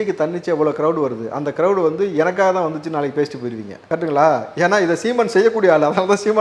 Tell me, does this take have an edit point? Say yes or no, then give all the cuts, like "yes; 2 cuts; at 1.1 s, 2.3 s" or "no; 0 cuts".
no; 0 cuts